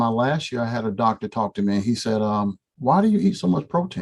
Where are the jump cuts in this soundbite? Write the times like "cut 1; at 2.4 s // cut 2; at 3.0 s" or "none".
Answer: none